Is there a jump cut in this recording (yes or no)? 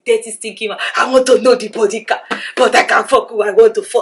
no